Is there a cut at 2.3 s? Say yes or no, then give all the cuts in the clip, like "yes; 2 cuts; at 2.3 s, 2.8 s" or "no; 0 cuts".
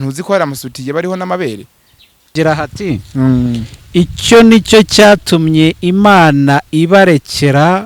yes; 1 cut; at 2.3 s